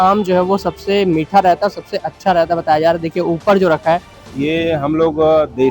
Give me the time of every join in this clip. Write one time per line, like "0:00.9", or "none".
0:04.2